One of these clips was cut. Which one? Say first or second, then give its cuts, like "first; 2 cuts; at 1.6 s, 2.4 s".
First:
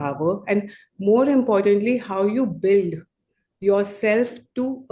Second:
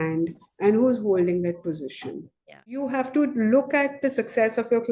second; 1 cut; at 2.8 s